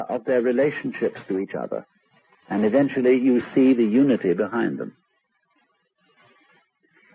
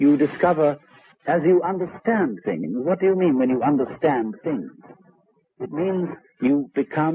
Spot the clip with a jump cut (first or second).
first